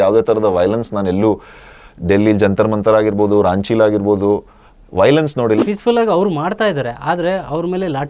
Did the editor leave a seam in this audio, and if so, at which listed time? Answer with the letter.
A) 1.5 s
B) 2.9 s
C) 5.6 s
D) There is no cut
C